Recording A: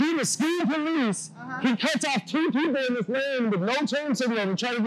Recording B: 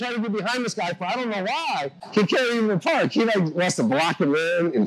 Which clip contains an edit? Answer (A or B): B